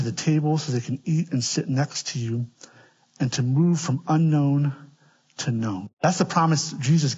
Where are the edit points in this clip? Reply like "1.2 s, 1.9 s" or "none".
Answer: 5.9 s

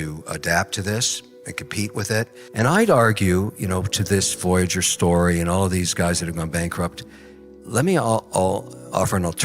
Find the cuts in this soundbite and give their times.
2.4 s

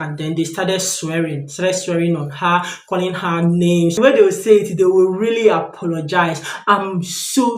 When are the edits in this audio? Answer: 4.0 s

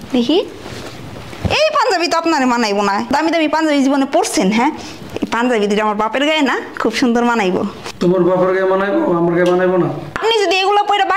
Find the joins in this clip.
3.1 s, 7.8 s, 10.1 s

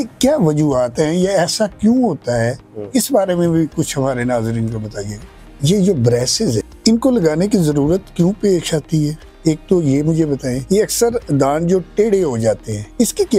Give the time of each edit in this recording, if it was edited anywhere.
5.4 s

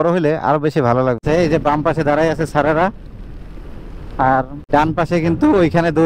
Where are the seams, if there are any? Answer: 1.2 s, 4.6 s

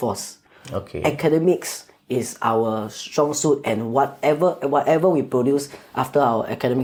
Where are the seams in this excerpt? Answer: none

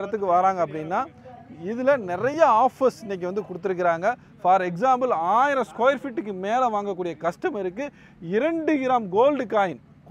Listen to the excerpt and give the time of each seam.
none

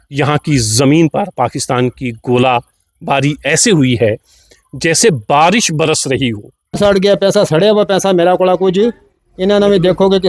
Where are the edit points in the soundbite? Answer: 6.8 s

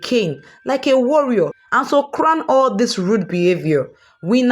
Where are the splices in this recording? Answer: 1.6 s

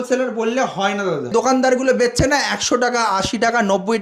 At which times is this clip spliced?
1.3 s

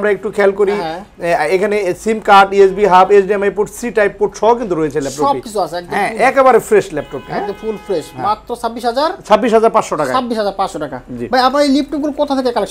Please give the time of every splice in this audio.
none

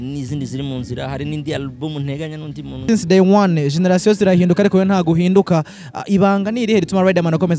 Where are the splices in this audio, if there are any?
2.8 s

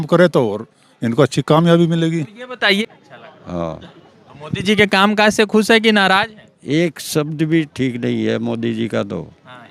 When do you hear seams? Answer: 2.8 s

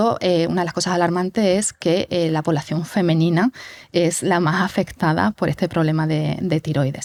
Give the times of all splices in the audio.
none

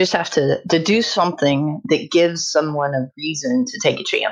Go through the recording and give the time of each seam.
none

